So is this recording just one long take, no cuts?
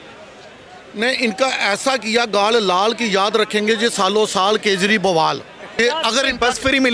no; 1 cut; at 5.6 s

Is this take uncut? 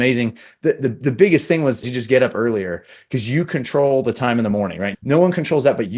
yes; 0 cuts

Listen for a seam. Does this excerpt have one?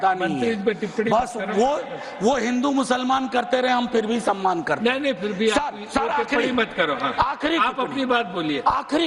no; 0 cuts

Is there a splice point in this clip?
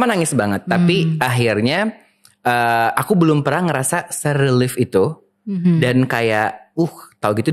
no; 0 cuts

